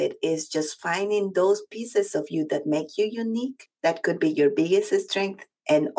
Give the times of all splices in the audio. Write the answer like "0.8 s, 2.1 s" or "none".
3.6 s